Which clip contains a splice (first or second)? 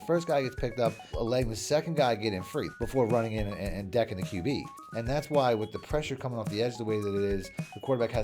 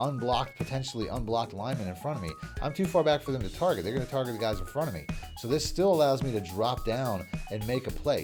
first